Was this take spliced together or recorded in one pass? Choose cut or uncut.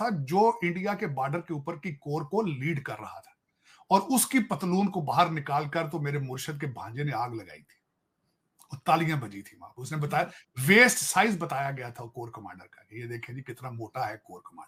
uncut